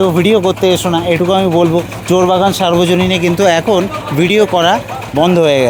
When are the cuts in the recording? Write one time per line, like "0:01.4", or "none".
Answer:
none